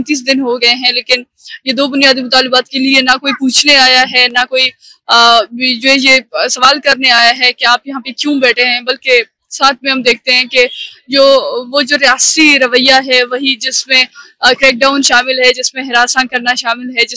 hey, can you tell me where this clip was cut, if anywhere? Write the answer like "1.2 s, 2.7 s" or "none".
none